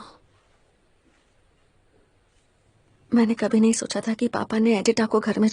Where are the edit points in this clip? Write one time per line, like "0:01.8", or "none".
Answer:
none